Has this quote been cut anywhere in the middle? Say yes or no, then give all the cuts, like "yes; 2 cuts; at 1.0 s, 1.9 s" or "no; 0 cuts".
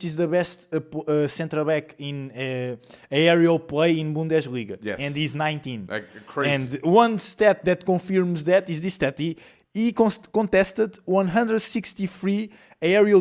no; 0 cuts